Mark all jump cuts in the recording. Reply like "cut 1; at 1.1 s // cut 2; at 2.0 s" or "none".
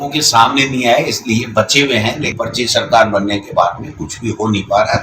cut 1; at 2.4 s